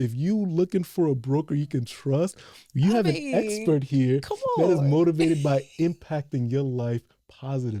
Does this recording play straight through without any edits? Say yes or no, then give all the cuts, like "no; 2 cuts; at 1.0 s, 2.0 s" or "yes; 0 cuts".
yes; 0 cuts